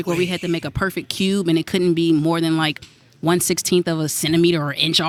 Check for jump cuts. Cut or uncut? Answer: uncut